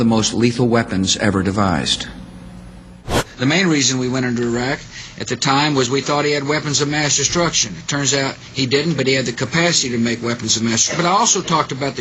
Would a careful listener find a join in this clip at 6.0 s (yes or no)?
yes